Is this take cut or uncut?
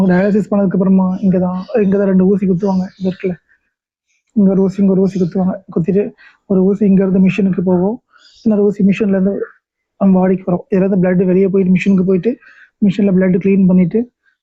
uncut